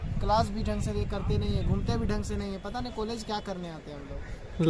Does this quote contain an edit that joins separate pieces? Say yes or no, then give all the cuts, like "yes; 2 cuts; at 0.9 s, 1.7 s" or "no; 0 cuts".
no; 0 cuts